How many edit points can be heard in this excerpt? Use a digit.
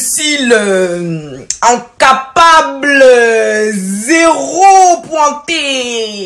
1